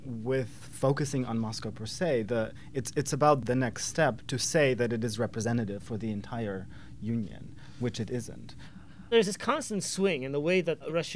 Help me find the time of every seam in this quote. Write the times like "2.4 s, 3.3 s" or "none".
3.4 s, 8.9 s

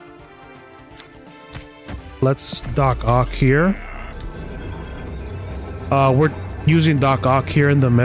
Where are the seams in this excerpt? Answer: 5.5 s, 6.5 s

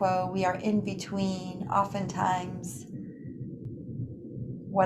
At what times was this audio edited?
3.7 s

